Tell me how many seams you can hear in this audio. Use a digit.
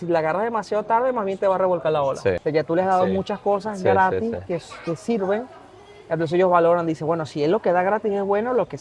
1